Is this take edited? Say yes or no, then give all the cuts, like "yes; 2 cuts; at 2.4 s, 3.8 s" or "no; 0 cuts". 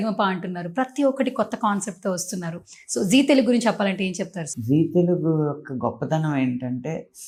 no; 0 cuts